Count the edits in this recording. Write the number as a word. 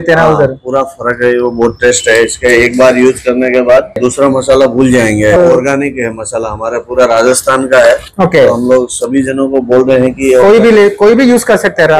two